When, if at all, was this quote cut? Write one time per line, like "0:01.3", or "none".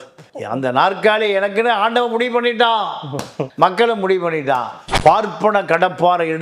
0:04.8